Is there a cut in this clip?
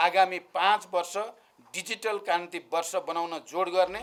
no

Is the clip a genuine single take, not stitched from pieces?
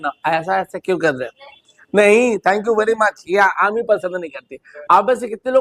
yes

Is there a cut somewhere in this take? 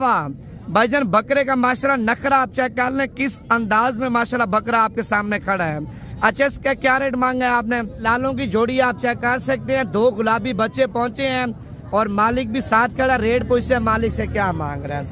yes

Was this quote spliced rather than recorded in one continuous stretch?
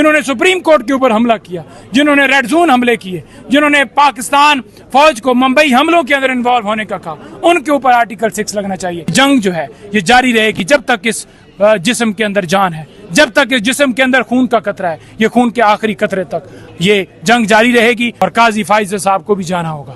yes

